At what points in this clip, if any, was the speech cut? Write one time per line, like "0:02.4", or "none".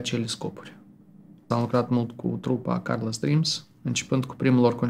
0:01.5